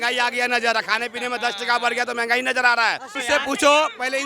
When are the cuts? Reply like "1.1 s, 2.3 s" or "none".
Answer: 3.1 s